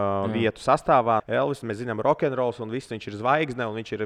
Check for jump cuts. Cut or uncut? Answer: cut